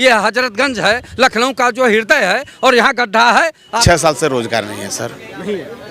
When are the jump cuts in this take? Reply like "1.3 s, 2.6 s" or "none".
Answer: 3.7 s